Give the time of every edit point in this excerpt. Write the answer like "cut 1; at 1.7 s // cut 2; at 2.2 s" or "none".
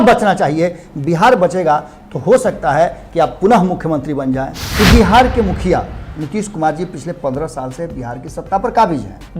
cut 1; at 4.6 s